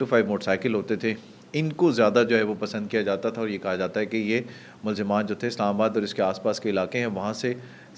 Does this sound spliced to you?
no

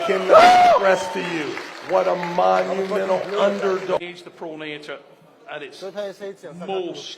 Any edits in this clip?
yes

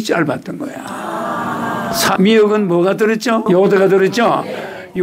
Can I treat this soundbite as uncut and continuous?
no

